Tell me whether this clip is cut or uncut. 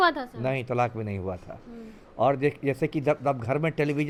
uncut